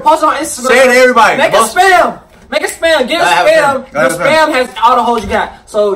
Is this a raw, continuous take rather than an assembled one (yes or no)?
yes